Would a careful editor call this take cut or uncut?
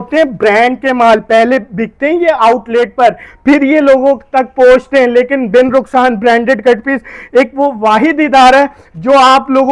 uncut